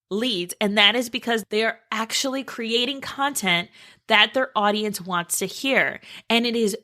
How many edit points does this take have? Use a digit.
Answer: 1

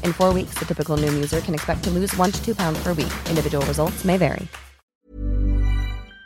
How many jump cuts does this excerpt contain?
1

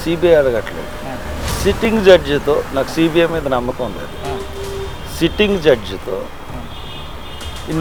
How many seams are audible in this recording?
0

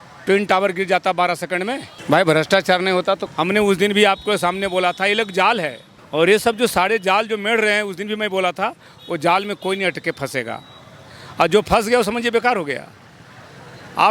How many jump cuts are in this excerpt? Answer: 0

